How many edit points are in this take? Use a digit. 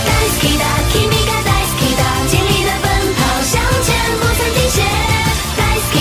0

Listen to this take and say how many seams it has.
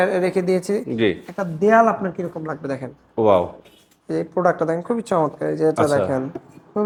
0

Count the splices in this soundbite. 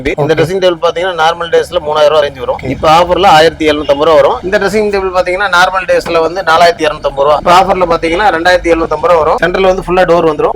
2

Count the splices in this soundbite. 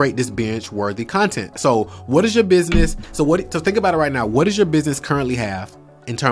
0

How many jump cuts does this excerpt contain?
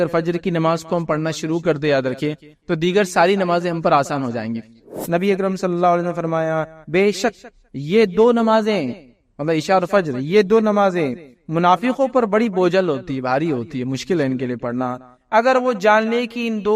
1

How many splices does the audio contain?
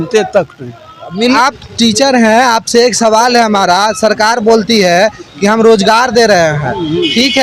1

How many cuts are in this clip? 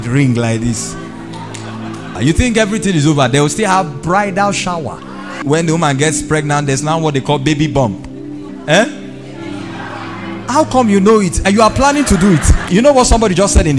4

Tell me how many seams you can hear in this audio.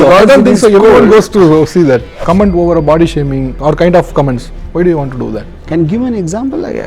2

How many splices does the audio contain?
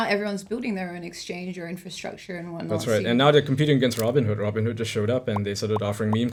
0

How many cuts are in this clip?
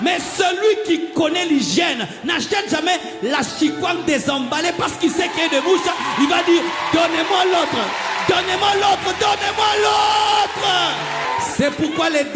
1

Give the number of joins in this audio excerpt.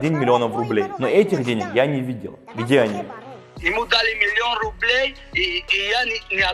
1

